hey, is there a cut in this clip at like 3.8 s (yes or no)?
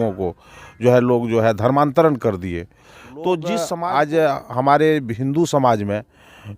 yes